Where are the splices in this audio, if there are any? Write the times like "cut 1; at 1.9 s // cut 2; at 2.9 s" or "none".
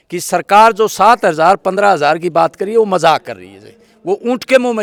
none